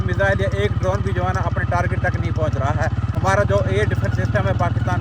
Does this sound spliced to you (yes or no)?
yes